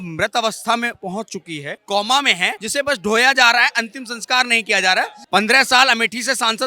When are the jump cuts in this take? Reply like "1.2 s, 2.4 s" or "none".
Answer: 1.7 s, 2.5 s, 5.2 s